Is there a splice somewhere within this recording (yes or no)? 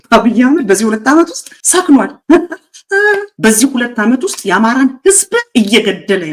no